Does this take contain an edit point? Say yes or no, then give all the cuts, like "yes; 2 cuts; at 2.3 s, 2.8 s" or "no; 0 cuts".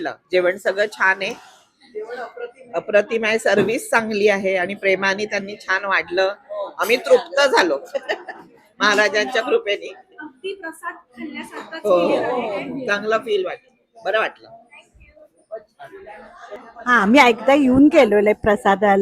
no; 0 cuts